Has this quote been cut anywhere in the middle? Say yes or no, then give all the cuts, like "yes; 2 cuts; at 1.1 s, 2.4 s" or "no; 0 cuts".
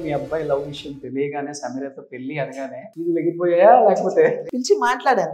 yes; 2 cuts; at 2.9 s, 4.4 s